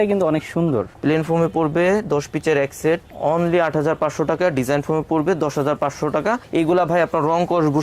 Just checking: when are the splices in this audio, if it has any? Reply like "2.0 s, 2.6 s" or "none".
none